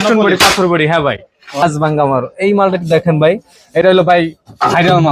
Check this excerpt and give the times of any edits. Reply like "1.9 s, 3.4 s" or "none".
1.6 s